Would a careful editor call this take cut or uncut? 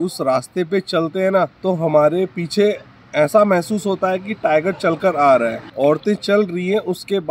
cut